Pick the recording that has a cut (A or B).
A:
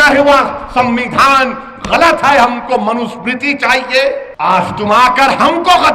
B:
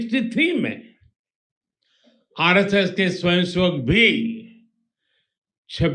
A